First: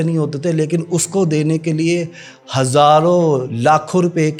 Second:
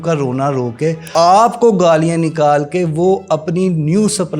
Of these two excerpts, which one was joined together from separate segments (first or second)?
second